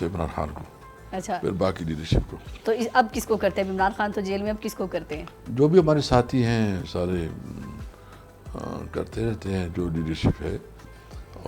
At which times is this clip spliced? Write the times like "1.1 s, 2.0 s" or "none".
none